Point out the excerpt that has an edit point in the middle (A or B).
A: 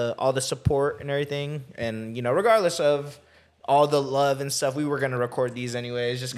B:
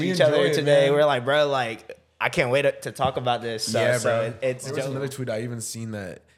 B